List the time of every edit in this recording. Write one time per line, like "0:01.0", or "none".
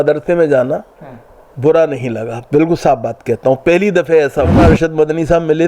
0:04.5